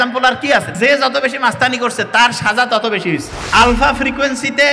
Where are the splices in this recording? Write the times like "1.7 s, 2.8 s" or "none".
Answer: 0.8 s, 3.4 s